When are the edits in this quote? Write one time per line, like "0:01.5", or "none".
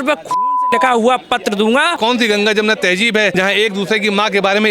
0:02.0
0:03.3